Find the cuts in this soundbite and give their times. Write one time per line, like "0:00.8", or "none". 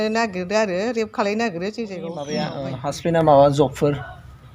0:02.5